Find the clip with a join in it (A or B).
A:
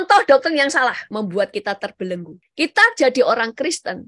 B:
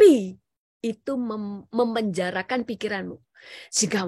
A